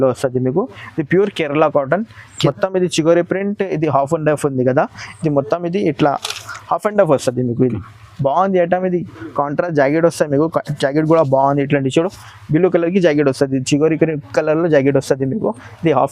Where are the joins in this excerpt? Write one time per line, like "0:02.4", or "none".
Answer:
0:02.2